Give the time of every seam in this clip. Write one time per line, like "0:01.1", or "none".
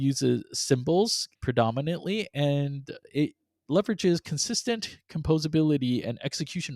0:01.3